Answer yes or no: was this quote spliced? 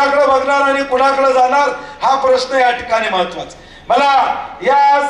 no